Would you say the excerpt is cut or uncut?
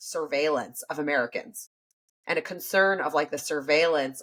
uncut